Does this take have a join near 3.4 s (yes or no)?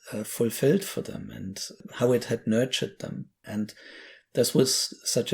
yes